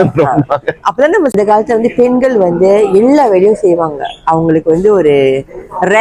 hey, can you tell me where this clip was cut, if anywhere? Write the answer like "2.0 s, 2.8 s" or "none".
1.3 s